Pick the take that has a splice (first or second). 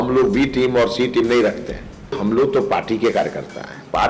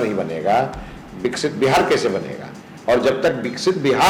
first